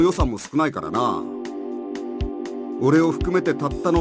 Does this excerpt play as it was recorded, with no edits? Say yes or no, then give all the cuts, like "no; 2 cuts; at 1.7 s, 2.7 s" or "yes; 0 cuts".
yes; 0 cuts